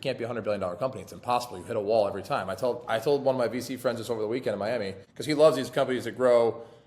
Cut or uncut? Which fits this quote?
cut